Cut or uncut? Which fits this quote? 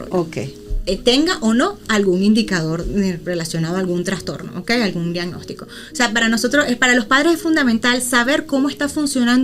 uncut